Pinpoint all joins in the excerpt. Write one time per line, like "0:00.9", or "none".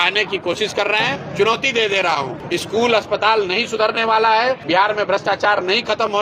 0:01.2
0:02.4
0:04.6